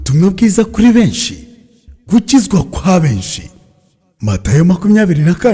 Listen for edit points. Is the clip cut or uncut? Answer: uncut